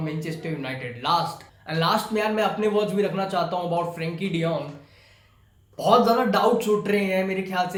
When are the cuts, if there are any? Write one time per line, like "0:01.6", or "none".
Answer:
none